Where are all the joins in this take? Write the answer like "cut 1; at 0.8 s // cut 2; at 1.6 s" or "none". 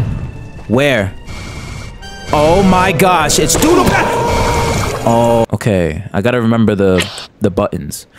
cut 1; at 5.4 s